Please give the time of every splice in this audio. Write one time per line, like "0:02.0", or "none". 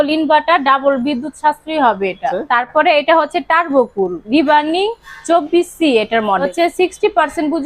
0:02.4
0:06.5